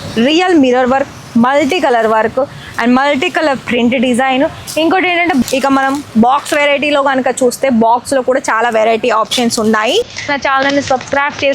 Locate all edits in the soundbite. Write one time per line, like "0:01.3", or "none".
0:05.4
0:10.3